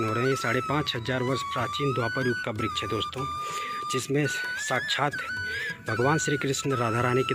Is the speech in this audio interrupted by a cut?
no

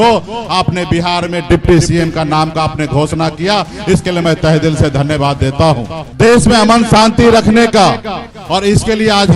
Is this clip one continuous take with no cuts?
no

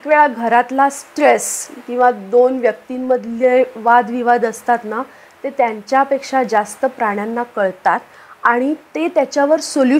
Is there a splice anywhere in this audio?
no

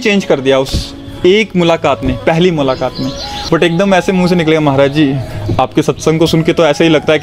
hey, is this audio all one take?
no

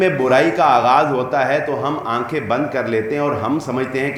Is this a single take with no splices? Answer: yes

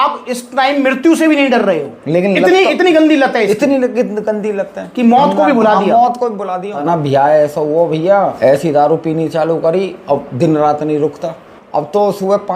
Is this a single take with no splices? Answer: no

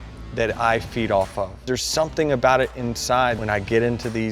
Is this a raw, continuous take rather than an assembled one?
no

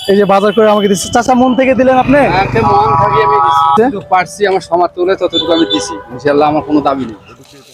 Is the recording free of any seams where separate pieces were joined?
yes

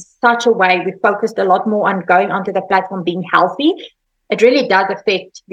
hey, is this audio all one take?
no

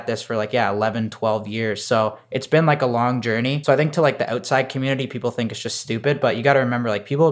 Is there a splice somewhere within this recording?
yes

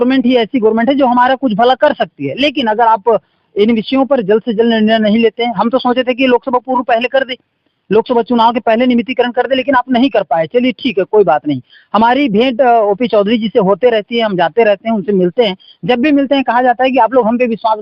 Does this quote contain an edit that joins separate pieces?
no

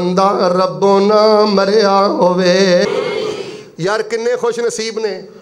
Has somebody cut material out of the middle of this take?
yes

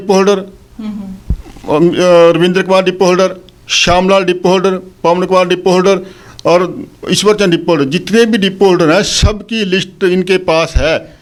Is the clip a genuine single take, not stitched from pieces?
yes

